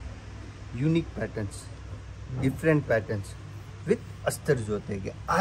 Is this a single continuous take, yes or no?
yes